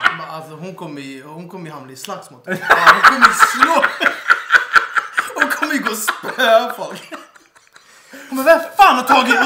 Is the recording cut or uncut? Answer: uncut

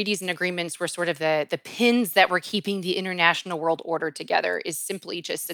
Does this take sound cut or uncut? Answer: uncut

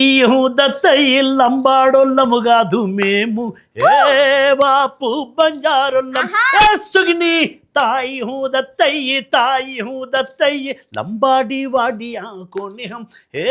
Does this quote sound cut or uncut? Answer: uncut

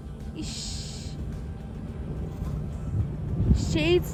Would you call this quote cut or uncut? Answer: uncut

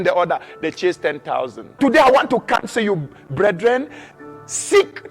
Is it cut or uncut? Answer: cut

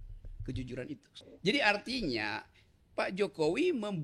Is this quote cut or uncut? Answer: cut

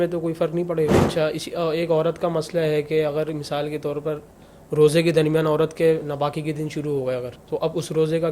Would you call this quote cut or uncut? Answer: cut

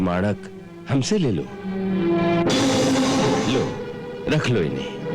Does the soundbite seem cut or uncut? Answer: cut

